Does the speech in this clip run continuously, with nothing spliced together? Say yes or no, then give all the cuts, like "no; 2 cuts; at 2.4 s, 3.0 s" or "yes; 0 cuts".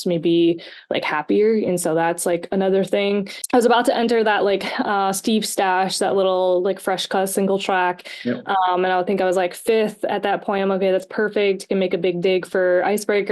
no; 1 cut; at 3.3 s